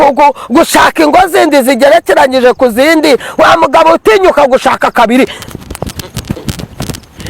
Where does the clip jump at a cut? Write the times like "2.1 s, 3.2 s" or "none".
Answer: 3.3 s